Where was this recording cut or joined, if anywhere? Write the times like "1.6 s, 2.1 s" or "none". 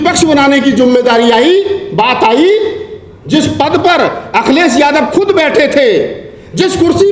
none